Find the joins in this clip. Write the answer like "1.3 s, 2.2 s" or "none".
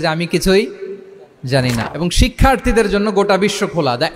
1.8 s